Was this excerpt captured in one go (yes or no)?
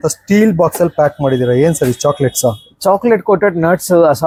yes